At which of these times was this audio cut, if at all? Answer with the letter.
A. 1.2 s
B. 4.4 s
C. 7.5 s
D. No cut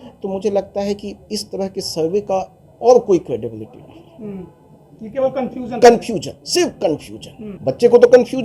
C